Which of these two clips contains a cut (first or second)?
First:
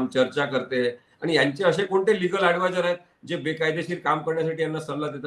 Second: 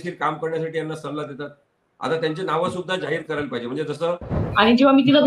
second